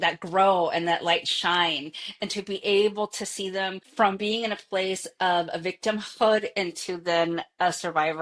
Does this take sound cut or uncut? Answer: cut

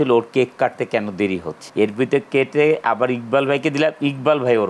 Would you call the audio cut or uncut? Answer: cut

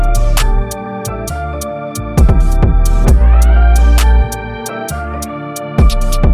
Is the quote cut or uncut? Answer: uncut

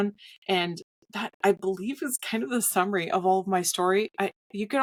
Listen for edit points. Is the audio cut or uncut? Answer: uncut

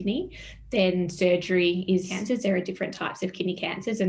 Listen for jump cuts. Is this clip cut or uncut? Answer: cut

